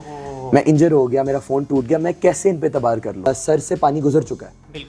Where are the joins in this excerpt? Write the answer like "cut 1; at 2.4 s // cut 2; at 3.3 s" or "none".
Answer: cut 1; at 3.3 s